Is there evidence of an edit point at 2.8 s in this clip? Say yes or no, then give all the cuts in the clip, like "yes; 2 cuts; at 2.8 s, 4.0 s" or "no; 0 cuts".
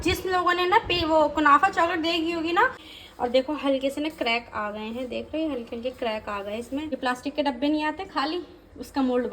yes; 2 cuts; at 2.8 s, 7.0 s